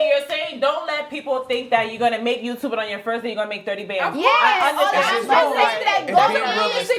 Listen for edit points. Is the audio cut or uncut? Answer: uncut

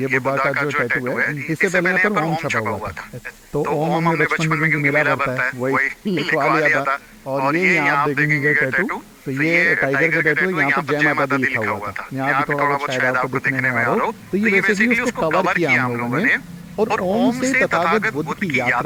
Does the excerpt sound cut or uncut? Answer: uncut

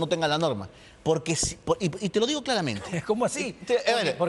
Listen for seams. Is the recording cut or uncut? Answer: uncut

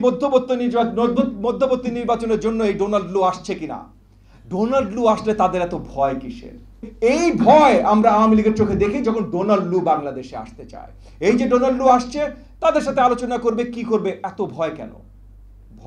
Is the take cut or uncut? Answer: cut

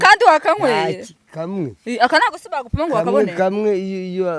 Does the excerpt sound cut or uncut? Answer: uncut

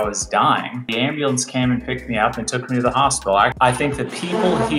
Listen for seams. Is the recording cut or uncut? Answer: cut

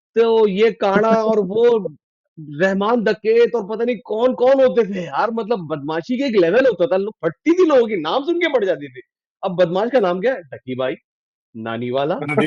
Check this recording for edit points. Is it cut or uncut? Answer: uncut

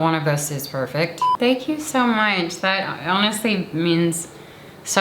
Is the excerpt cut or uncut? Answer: cut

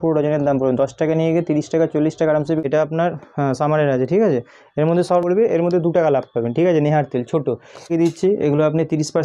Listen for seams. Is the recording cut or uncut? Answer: cut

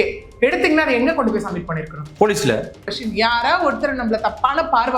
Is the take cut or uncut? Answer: cut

